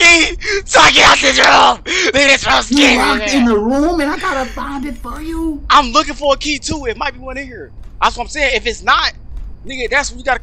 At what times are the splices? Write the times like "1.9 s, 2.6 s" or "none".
none